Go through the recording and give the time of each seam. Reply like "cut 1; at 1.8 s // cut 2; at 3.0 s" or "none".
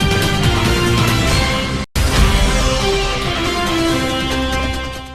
cut 1; at 1.8 s